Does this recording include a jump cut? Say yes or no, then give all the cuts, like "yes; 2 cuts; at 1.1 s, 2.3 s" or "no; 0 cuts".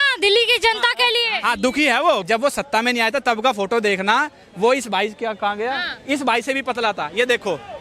yes; 1 cut; at 2.2 s